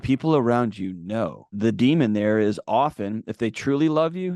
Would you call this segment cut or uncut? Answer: cut